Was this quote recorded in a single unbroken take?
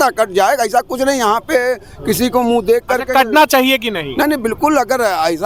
yes; 0 cuts

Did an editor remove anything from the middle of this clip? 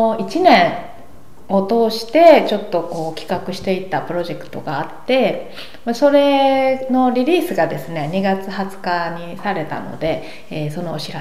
no; 0 cuts

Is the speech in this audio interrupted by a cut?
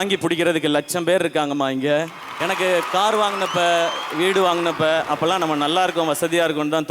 yes; 1 cut; at 2.3 s

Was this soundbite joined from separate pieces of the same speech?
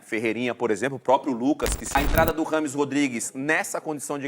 yes; 1 cut; at 1.8 s

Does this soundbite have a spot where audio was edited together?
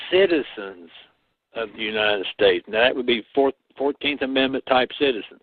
no; 0 cuts

